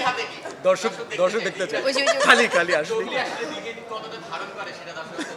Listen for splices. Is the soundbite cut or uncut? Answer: uncut